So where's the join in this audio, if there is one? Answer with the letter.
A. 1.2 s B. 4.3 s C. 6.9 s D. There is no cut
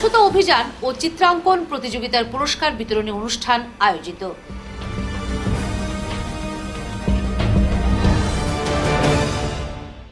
D